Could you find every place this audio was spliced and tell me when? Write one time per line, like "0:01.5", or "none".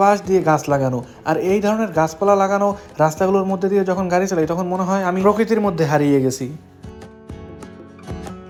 none